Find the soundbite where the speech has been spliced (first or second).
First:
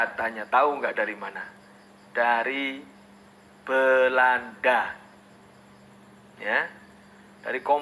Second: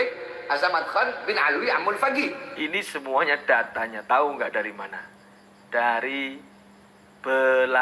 second